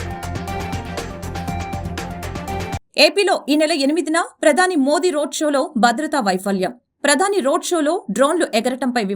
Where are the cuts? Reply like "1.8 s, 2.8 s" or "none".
2.8 s